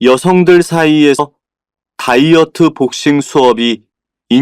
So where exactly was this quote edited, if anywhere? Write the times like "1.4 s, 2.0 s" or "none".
1.2 s